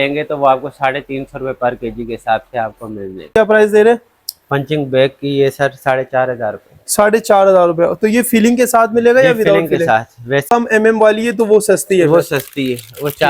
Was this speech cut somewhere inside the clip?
yes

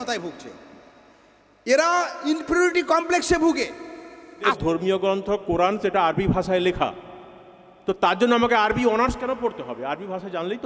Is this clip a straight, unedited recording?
no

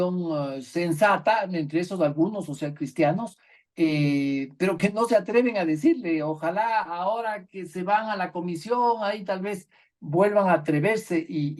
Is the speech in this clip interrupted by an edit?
no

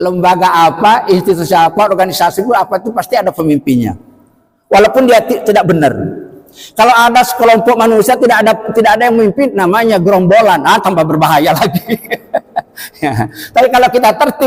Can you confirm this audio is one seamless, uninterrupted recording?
yes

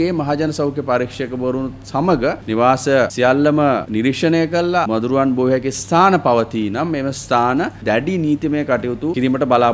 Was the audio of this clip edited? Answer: yes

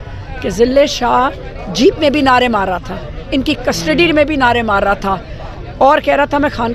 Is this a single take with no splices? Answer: yes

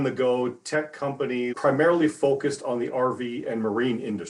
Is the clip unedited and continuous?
no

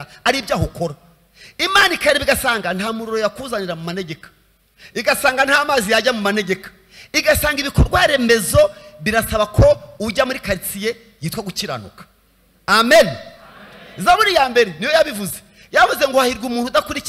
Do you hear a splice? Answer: no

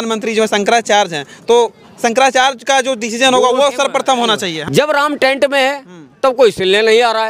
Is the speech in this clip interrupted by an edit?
yes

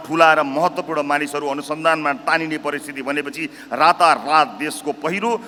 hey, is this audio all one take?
yes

